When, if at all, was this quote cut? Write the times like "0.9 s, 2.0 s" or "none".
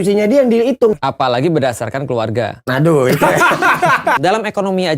1.0 s, 2.6 s, 4.2 s

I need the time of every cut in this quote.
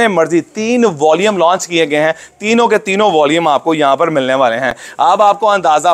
none

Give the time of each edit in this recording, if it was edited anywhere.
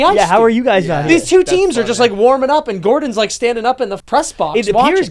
4.0 s

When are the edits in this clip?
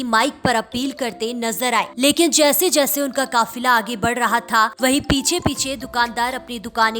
1.9 s, 4.7 s

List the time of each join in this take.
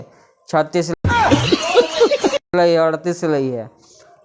0.9 s, 2.5 s

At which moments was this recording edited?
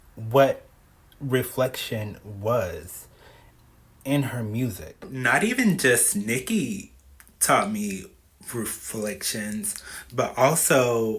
5.2 s

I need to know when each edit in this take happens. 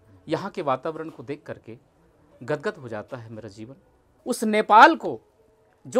4.1 s

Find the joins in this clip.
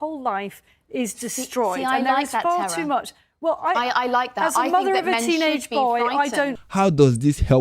6.5 s

